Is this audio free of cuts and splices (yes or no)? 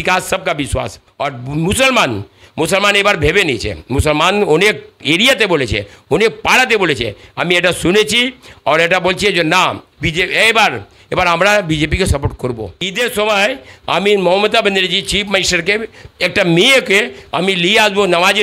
no